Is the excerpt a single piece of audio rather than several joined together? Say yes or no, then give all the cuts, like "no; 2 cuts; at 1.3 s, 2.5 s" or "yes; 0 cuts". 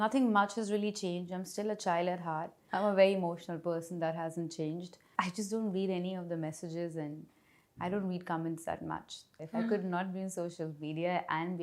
no; 3 cuts; at 2.6 s, 5.0 s, 9.4 s